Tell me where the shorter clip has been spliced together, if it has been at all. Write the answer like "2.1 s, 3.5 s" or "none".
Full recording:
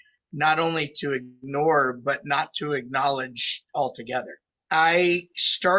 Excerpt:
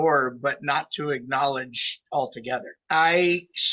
2.7 s